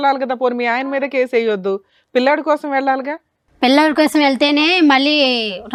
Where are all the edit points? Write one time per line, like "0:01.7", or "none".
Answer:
none